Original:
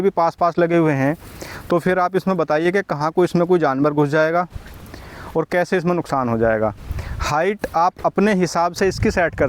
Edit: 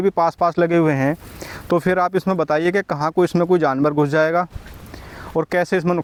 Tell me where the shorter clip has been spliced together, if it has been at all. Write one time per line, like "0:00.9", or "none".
none